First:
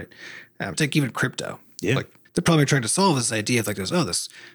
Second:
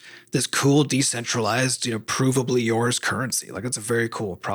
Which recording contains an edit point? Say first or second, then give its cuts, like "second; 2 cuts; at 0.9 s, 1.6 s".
first; 2 cuts; at 0.7 s, 2.2 s